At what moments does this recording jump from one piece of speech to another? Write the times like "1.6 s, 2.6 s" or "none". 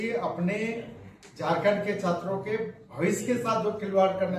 none